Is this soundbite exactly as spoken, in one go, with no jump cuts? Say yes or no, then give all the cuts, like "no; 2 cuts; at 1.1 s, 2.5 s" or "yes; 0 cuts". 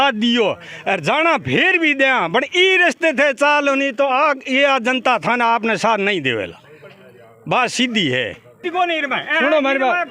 no; 1 cut; at 8.7 s